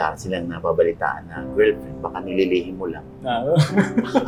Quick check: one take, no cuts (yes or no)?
yes